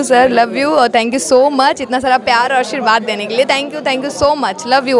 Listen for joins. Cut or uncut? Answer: uncut